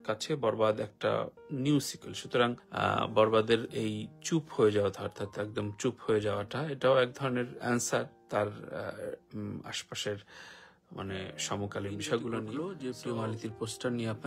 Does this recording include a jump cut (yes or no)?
yes